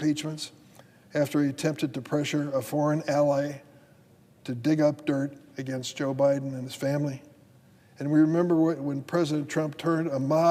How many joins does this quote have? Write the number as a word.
zero